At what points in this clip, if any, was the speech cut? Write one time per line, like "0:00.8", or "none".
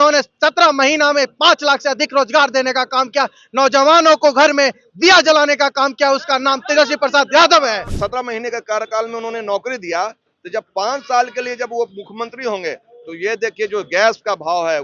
0:07.9